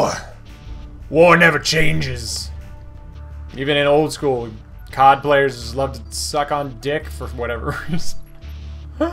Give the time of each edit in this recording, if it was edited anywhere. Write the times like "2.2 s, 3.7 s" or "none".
none